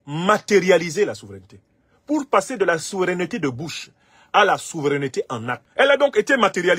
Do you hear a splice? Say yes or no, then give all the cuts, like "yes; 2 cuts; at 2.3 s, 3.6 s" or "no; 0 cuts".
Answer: yes; 1 cut; at 5.6 s